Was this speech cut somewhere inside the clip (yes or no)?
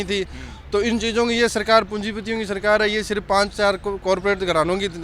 no